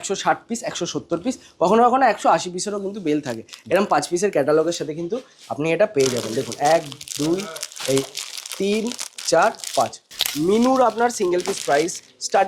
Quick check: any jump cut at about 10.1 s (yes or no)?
yes